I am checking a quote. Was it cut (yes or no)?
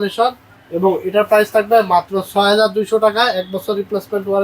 no